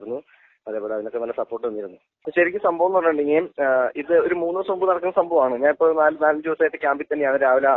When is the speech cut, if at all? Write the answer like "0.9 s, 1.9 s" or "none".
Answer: 2.0 s